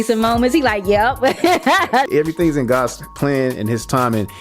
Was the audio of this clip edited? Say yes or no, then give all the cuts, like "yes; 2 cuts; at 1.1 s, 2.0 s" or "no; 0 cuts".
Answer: yes; 1 cut; at 2.0 s